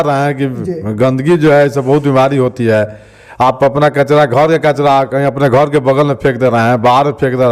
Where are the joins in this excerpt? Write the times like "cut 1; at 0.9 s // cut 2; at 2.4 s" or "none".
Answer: none